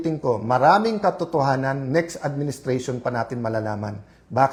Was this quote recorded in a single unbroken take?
yes; 0 cuts

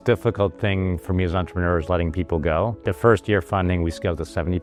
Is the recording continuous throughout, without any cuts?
yes; 0 cuts

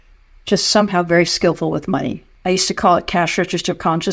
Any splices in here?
yes; 1 cut; at 2.2 s

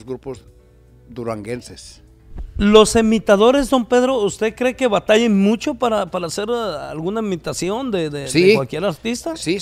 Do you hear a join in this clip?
no; 0 cuts

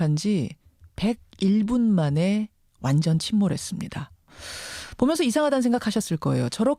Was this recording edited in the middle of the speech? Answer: no; 0 cuts

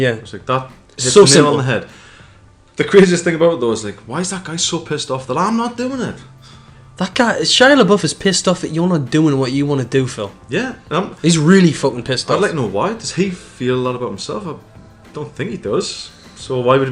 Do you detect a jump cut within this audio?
no; 0 cuts

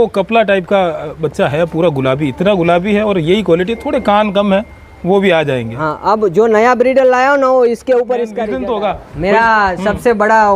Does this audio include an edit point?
yes; 1 cut; at 8.4 s

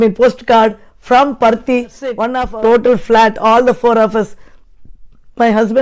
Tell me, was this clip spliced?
yes; 1 cut; at 2.3 s

